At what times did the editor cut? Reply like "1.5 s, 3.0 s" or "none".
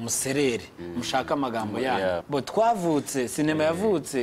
2.2 s